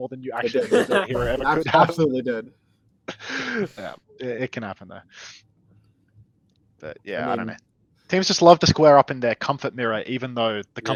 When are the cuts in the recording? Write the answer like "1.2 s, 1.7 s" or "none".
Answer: none